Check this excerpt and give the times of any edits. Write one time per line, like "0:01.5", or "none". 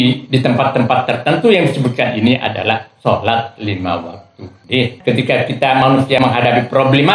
0:05.0
0:06.2

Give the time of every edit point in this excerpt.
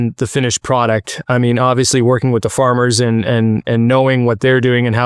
none

